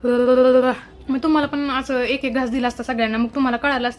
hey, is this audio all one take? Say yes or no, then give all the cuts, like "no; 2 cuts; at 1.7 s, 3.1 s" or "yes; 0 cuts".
no; 1 cut; at 0.9 s